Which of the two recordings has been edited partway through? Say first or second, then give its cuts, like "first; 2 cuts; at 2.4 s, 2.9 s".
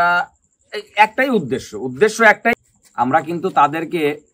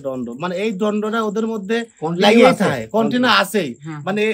first; 1 cut; at 2.6 s